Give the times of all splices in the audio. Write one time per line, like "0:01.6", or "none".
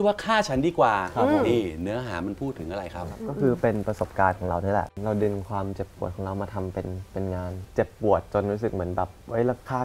0:03.2
0:05.0
0:07.7